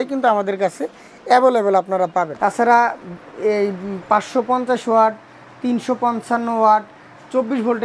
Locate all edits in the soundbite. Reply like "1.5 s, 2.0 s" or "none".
2.3 s